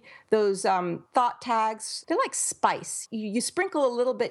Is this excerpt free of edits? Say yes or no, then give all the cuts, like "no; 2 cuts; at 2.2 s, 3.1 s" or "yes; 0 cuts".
no; 3 cuts; at 1.0 s, 2.0 s, 3.0 s